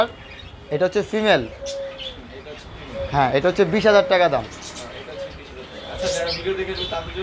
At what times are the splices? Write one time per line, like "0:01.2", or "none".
none